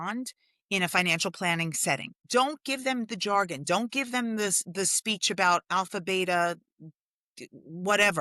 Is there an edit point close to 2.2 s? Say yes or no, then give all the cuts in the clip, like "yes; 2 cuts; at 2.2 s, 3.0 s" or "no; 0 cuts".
yes; 1 cut; at 2.2 s